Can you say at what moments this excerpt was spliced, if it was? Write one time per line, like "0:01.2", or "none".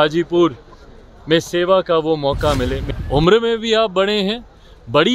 0:02.8